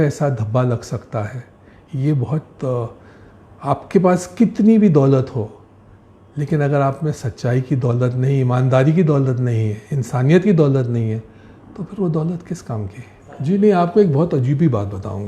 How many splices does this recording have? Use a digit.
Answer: 1